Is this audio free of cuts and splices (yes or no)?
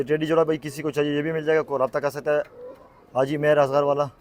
yes